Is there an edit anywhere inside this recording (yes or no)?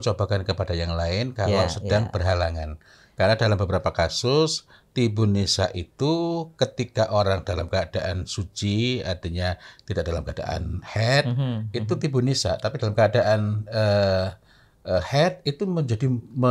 no